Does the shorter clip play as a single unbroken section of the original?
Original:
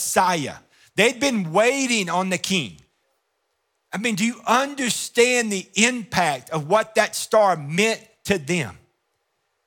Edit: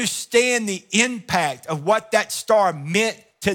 yes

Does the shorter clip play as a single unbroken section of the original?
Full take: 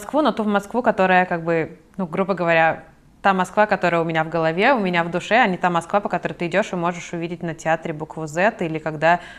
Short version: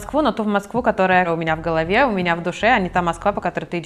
no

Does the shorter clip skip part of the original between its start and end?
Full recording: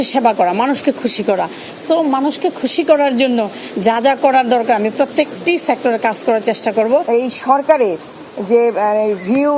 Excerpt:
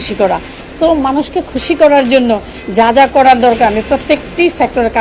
no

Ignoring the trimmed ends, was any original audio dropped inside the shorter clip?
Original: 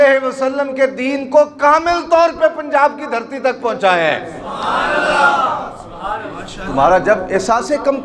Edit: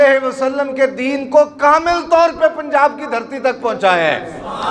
no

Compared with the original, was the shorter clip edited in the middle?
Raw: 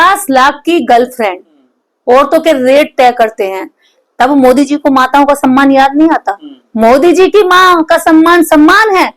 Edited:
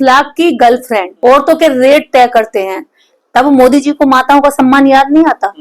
yes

